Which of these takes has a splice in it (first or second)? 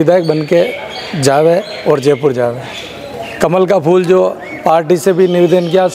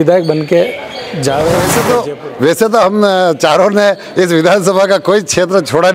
second